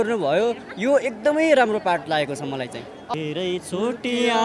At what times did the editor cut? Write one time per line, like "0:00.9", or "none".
0:03.1